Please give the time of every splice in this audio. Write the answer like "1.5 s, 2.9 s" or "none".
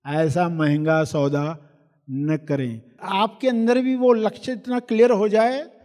2.9 s